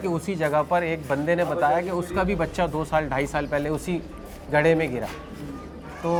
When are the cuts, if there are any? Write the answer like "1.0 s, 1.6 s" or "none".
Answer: none